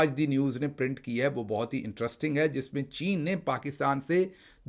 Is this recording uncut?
yes; 0 cuts

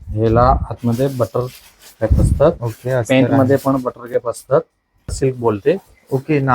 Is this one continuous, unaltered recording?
no; 1 cut; at 5.1 s

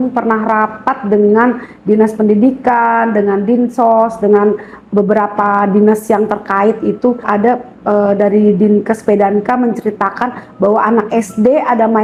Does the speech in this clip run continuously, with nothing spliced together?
yes; 0 cuts

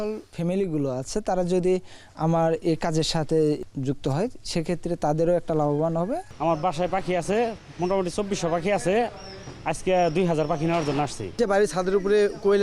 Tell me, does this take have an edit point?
yes; 3 cuts; at 3.6 s, 6.3 s, 11.4 s

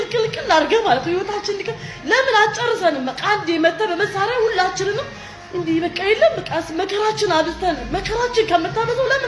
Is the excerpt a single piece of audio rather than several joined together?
yes; 0 cuts

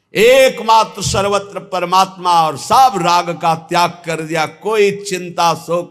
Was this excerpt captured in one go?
yes; 0 cuts

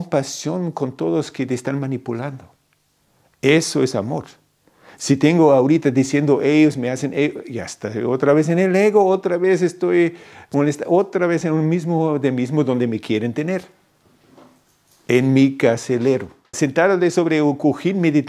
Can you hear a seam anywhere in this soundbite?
yes; 1 cut; at 16.5 s

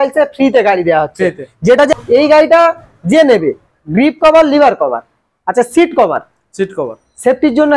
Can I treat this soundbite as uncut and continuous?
no; 1 cut; at 1.9 s

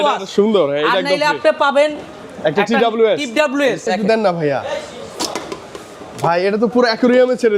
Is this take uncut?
no; 1 cut; at 3.8 s

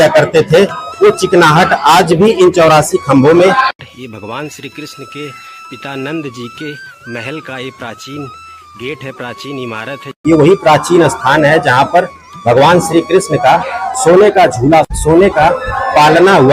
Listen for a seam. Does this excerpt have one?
yes; 3 cuts; at 3.8 s, 10.1 s, 14.9 s

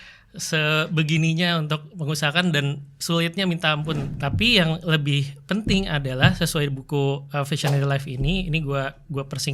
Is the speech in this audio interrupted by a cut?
yes; 1 cut; at 4.1 s

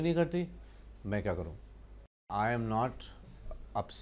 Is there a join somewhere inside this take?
yes; 1 cut; at 2.2 s

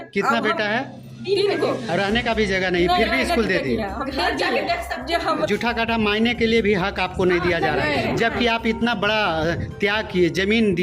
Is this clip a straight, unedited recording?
no; 1 cut; at 5.5 s

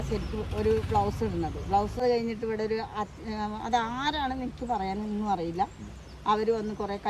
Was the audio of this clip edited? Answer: yes; 1 cut; at 2.0 s

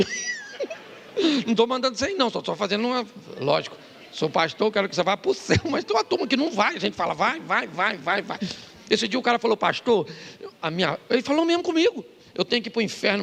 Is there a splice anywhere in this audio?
no; 0 cuts

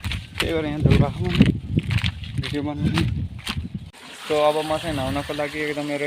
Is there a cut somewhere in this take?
yes; 1 cut; at 3.9 s

